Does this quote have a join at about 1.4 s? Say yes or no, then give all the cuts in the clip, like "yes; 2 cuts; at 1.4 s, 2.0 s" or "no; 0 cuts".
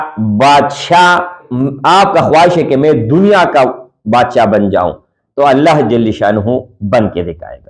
yes; 1 cut; at 1.4 s